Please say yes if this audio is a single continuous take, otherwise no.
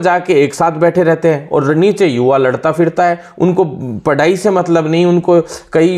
yes